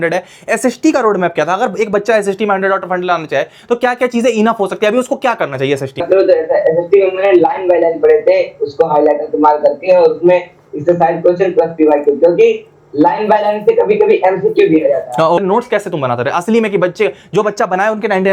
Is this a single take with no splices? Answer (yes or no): no